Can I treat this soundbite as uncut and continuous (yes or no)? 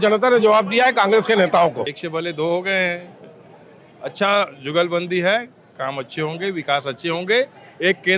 no